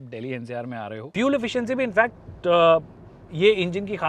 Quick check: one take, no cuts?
no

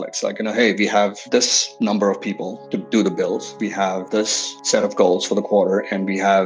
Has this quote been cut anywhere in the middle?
no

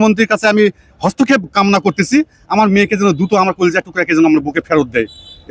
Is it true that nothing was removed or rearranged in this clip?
yes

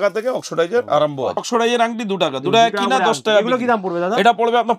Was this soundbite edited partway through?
yes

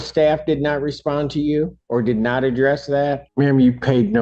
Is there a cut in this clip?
yes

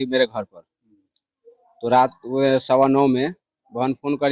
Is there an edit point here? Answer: no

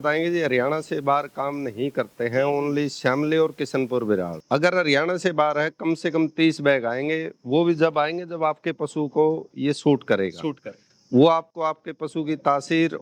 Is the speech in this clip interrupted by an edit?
yes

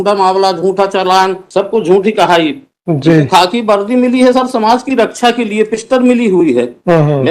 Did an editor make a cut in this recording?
yes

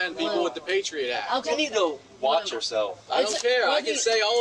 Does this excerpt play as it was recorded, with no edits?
no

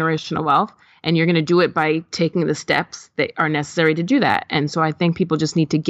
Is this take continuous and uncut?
yes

